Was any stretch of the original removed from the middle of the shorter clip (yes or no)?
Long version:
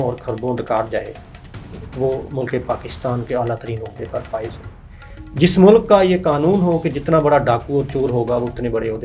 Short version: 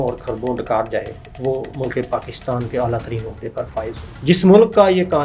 yes